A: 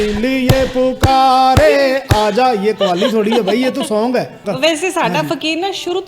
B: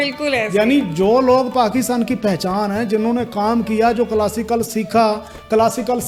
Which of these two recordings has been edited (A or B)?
A